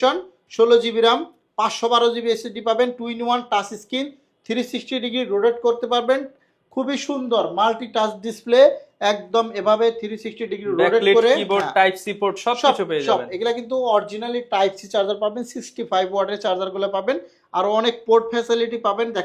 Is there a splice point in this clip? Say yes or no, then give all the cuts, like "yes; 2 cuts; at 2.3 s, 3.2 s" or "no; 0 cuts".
no; 0 cuts